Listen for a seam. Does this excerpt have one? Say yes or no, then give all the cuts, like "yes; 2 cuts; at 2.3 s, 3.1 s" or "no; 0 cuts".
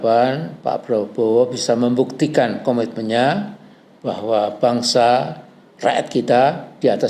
no; 0 cuts